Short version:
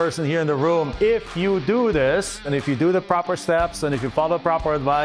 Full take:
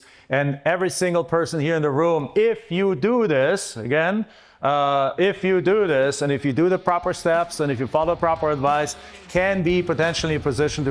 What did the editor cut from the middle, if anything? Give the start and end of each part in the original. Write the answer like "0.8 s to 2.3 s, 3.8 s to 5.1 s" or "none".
3.8 s to 6.2 s

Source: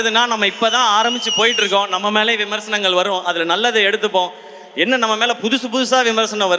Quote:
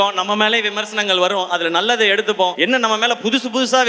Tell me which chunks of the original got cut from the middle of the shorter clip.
4.3 s to 4.7 s

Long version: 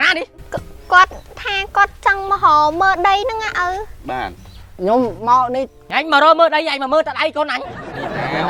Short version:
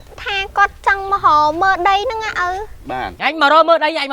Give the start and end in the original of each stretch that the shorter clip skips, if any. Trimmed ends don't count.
4.3 s to 5.8 s

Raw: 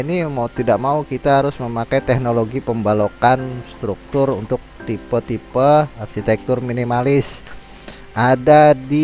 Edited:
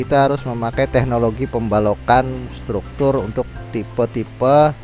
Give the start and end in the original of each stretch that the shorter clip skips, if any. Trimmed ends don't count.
none

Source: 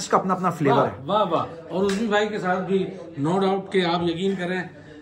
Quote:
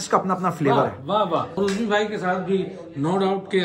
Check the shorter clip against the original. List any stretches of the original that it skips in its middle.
1.5 s to 1.7 s

